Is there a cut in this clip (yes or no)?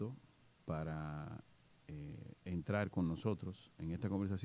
no